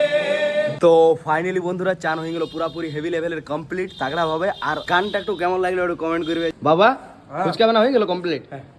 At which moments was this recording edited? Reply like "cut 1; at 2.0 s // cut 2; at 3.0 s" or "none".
cut 1; at 6.5 s

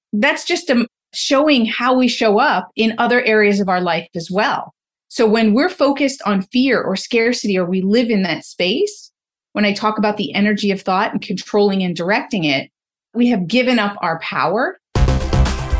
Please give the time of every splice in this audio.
cut 1; at 14.8 s

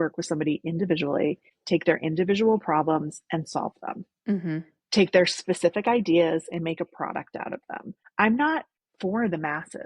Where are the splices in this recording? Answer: cut 1; at 1.5 s // cut 2; at 8.0 s // cut 3; at 8.8 s

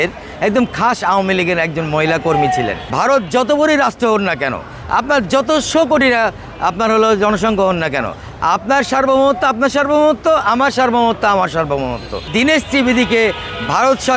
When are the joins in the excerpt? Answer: cut 1; at 2.8 s // cut 2; at 12.3 s

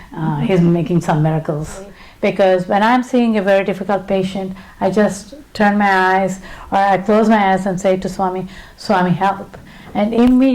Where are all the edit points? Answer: cut 1; at 2.0 s

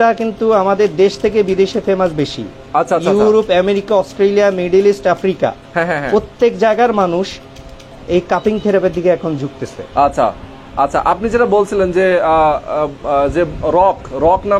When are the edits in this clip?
none

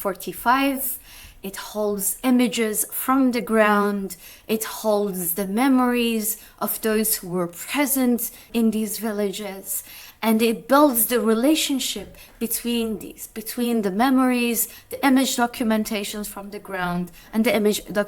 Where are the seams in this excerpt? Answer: none

